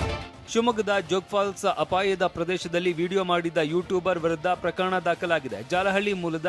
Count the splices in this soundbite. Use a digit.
0